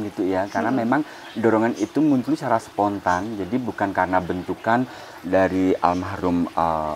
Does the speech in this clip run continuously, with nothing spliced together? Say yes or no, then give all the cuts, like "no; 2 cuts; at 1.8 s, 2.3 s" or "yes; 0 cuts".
yes; 0 cuts